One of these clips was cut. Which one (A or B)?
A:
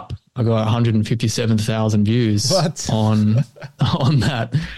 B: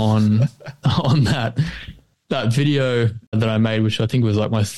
B